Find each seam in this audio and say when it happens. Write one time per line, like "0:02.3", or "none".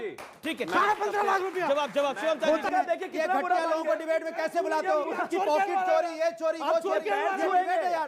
0:02.7